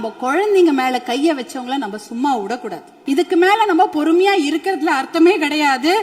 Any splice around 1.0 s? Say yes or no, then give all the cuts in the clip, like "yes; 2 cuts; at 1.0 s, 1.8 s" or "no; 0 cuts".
no; 1 cut; at 2.9 s